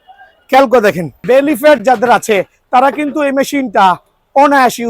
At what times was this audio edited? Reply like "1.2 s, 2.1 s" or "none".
1.1 s